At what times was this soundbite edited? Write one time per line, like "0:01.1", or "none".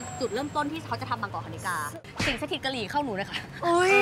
0:01.9